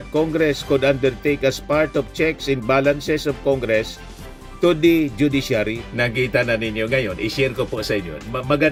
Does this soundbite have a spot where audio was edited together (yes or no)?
no